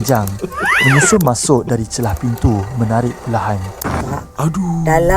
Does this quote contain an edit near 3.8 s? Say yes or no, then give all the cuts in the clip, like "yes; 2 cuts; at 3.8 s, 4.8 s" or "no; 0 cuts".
yes; 1 cut; at 3.8 s